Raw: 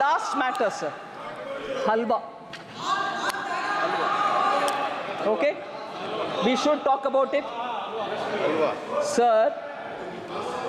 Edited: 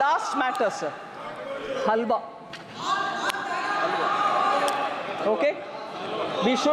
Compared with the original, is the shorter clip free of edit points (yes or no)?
yes